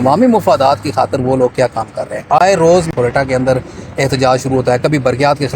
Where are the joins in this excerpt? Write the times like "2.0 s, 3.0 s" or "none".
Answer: 2.9 s

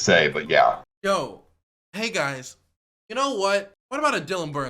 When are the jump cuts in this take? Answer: 0.8 s, 3.8 s

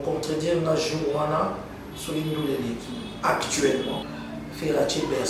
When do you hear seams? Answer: 4.1 s

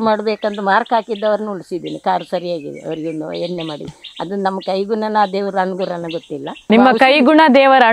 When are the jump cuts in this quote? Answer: 6.7 s

